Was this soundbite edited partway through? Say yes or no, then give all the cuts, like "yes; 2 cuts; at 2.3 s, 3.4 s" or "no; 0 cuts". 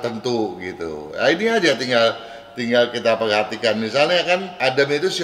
no; 0 cuts